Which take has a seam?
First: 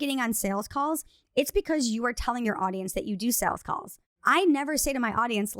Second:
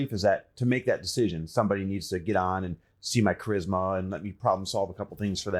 first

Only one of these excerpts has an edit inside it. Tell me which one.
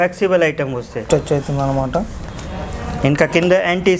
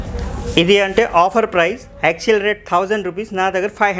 first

